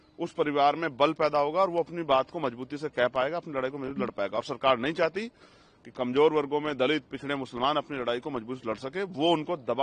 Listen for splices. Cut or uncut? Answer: uncut